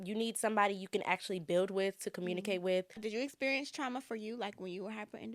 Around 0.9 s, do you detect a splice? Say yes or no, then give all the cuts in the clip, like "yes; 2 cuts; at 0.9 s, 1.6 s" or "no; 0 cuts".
no; 1 cut; at 3.0 s